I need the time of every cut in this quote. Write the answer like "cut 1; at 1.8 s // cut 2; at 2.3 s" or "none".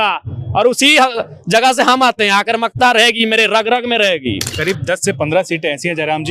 cut 1; at 4.5 s